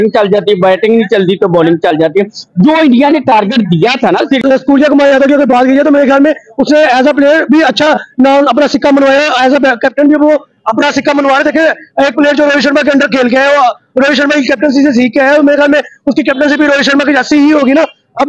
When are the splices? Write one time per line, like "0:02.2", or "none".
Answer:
0:04.4